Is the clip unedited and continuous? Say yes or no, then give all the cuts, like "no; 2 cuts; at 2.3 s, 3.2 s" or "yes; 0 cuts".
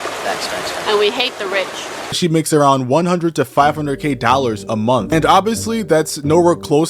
no; 2 cuts; at 2.2 s, 5.1 s